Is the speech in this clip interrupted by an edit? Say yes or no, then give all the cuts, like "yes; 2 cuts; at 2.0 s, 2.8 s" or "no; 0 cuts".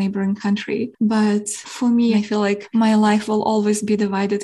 yes; 2 cuts; at 0.9 s, 2.1 s